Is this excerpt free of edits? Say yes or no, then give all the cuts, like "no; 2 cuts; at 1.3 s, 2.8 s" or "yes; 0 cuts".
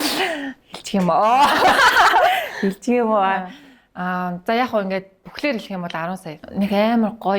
no; 1 cut; at 6.5 s